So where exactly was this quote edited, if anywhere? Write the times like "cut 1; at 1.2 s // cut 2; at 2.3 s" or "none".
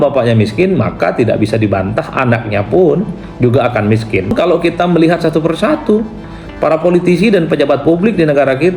cut 1; at 4.3 s